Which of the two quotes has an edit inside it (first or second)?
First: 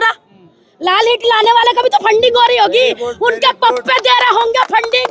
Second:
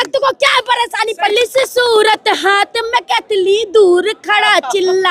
second